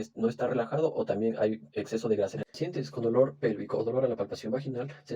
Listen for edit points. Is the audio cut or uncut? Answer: cut